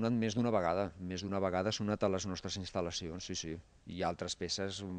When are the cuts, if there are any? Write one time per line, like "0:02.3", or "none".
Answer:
none